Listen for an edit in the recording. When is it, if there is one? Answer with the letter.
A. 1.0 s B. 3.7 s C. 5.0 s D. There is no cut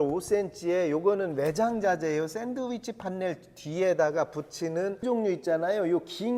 C